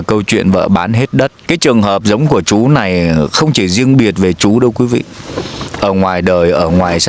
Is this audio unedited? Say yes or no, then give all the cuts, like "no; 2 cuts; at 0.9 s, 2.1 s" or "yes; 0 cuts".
no; 1 cut; at 1.4 s